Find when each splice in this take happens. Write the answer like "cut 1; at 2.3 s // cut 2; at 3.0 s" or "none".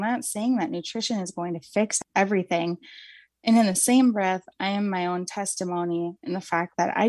cut 1; at 2.0 s

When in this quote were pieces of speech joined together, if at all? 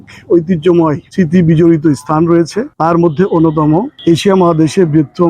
cut 1; at 1.0 s // cut 2; at 2.6 s // cut 3; at 3.9 s

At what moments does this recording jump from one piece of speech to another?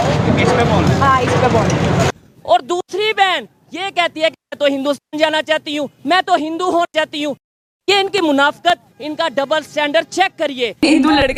none

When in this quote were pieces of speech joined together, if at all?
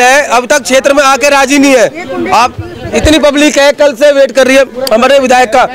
none

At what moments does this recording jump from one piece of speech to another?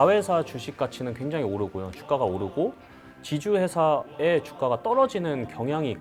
none

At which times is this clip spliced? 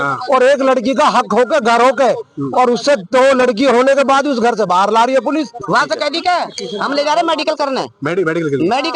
cut 1; at 5.6 s

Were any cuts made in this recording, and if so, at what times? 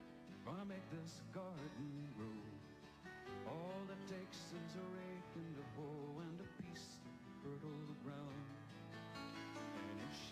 none

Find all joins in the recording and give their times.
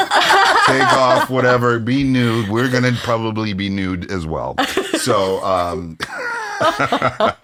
none

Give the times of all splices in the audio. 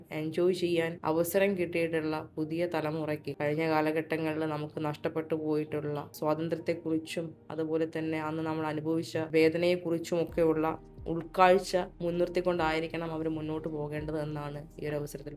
cut 1; at 1.0 s // cut 2; at 3.3 s // cut 3; at 6.1 s // cut 4; at 9.3 s // cut 5; at 11.9 s

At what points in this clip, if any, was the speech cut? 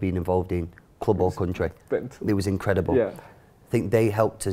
none

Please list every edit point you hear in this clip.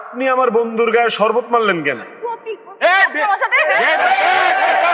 cut 1; at 2.3 s

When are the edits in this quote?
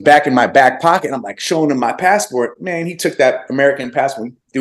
none

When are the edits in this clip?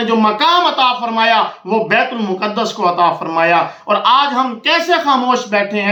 none

